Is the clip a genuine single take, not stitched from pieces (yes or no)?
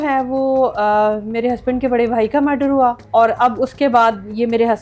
no